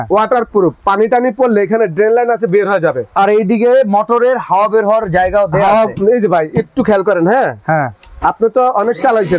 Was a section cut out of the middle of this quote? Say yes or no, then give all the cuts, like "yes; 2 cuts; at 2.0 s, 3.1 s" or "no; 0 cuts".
no; 0 cuts